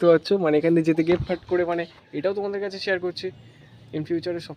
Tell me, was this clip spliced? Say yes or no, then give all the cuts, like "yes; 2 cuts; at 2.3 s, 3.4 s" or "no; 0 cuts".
yes; 1 cut; at 2.0 s